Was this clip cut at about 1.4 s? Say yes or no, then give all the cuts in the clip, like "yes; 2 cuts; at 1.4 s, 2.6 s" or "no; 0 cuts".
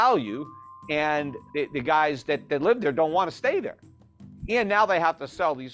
yes; 1 cut; at 1.4 s